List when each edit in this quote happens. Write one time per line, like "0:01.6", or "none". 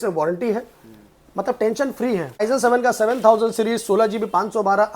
0:02.4